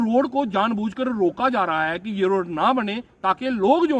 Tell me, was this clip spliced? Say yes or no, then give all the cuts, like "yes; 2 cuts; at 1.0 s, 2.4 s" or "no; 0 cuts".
no; 0 cuts